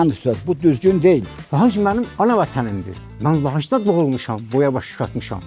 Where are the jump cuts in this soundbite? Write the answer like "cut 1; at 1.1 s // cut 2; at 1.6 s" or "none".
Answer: cut 1; at 1.3 s